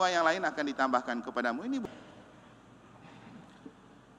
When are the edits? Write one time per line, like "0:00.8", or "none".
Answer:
0:01.8